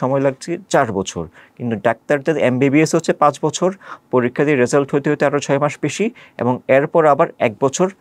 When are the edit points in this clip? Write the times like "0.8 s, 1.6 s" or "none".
none